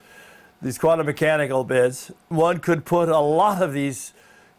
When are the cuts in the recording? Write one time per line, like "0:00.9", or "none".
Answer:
0:02.2